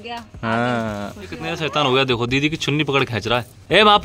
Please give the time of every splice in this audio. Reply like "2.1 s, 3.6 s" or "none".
1.5 s